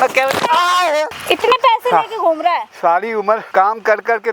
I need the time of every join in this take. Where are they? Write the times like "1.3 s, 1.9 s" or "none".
1.2 s, 3.5 s

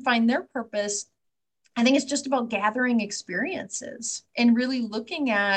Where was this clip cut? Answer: none

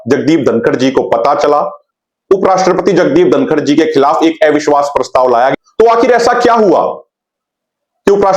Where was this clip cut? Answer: 1.8 s, 5.5 s

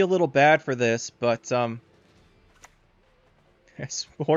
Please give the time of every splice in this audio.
none

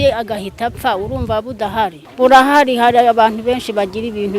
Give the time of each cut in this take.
2.0 s

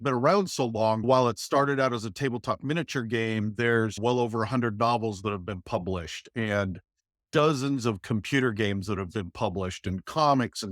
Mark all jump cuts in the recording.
1.0 s

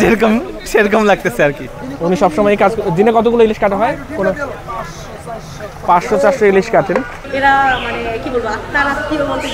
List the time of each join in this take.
1.7 s, 7.2 s

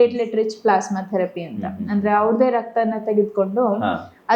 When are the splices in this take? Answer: none

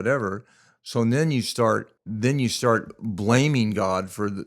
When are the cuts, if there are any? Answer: 2.0 s

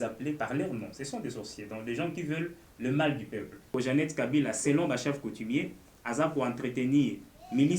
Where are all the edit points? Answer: 3.7 s

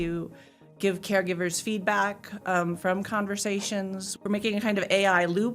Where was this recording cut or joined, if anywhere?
4.1 s

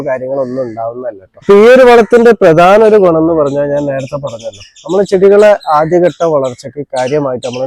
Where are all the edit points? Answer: none

